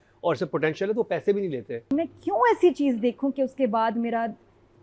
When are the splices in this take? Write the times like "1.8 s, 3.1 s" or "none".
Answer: 1.9 s